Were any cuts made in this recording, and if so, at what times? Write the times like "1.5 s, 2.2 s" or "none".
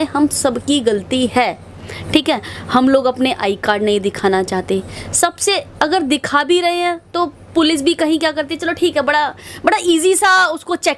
none